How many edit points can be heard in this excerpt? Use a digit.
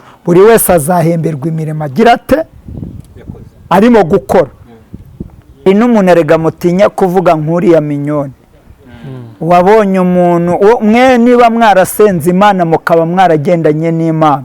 1